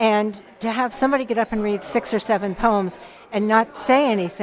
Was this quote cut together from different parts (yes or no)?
no